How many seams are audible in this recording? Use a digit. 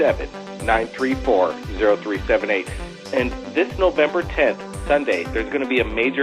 0